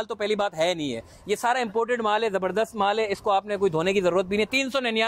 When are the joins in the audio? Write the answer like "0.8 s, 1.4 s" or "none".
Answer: none